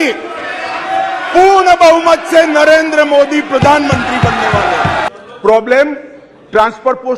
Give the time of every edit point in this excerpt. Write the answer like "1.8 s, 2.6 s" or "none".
5.1 s

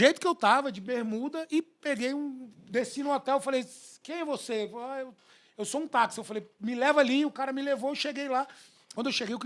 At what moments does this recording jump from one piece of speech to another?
none

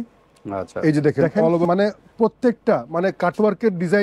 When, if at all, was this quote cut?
1.6 s

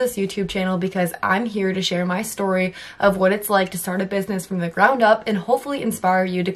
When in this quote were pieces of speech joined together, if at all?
none

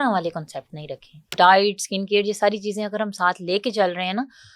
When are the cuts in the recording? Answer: 1.3 s

